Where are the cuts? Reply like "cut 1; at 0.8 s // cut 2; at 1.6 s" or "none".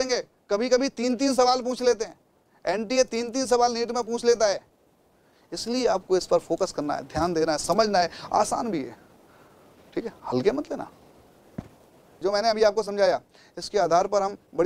cut 1; at 12.2 s